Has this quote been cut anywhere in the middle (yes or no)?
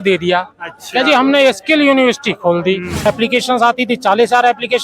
yes